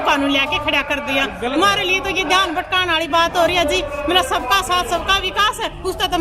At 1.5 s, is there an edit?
no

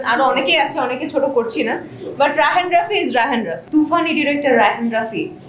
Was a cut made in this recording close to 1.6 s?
no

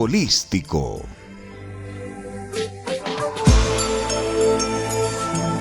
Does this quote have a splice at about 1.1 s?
yes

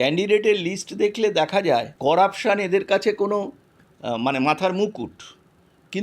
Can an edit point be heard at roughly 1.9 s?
yes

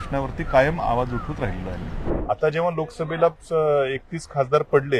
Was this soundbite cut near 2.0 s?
yes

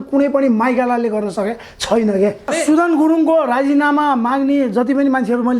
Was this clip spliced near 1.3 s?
no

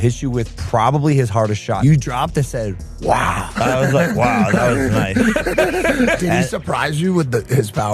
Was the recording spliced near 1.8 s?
yes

